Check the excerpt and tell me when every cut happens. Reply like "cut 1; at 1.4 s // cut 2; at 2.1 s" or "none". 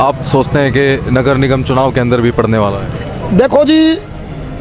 none